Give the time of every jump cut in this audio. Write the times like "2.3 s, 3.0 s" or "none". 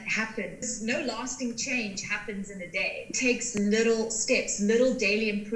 3.1 s